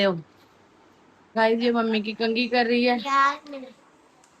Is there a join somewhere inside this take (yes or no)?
yes